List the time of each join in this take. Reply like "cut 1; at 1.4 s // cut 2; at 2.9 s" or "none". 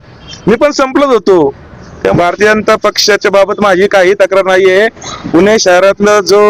cut 1; at 2.1 s